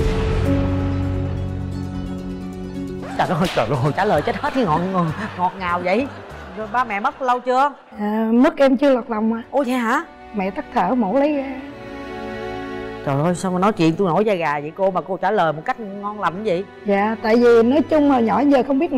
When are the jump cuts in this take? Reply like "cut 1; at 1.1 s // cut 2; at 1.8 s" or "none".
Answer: none